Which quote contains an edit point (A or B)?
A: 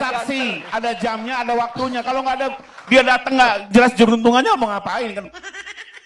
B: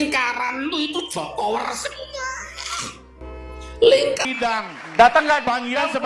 B